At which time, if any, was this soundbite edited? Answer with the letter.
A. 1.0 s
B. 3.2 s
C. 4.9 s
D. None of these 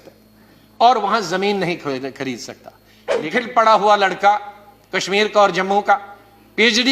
B